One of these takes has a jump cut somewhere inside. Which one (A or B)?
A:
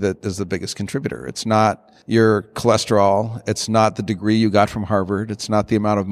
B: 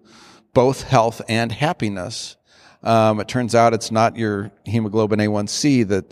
A